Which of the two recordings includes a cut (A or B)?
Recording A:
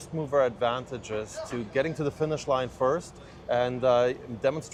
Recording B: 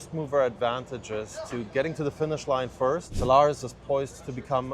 B